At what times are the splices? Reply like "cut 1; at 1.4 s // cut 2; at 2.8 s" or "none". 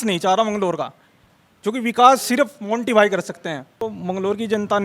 cut 1; at 3.8 s